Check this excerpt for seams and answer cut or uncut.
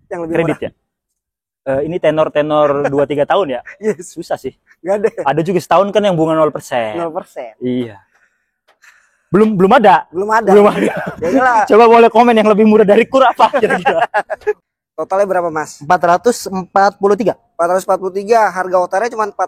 cut